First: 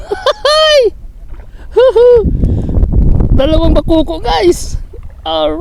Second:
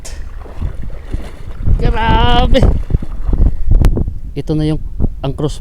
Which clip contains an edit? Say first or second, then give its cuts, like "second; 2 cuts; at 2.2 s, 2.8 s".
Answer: second; 1 cut; at 3.9 s